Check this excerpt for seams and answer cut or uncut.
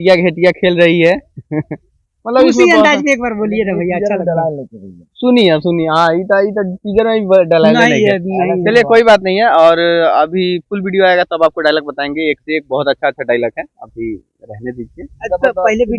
uncut